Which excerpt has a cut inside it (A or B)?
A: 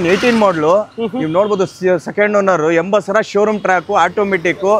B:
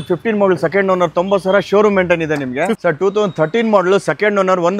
B